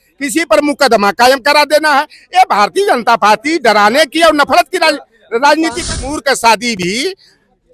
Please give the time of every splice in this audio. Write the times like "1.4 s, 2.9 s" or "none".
6.1 s